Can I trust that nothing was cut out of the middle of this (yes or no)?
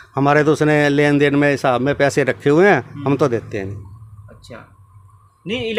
yes